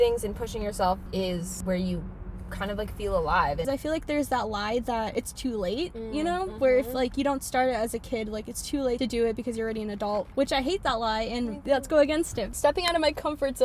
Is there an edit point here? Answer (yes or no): yes